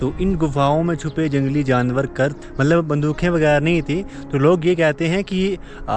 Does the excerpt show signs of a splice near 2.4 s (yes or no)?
yes